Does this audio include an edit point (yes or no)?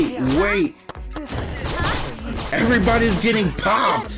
no